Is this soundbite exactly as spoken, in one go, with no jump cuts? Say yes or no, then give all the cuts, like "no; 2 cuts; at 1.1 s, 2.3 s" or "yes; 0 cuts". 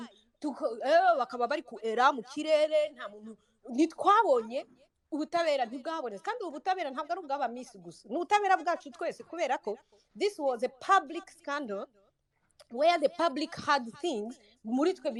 yes; 0 cuts